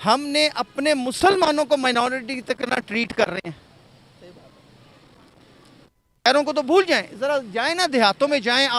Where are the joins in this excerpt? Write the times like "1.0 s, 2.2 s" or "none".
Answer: none